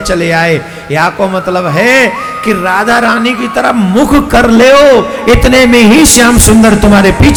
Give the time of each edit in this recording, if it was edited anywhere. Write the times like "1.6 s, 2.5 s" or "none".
none